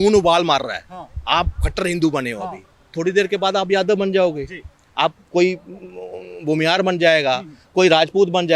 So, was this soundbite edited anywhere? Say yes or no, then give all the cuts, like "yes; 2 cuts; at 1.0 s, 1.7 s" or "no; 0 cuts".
no; 0 cuts